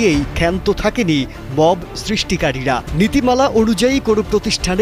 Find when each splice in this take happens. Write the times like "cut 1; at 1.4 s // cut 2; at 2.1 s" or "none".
none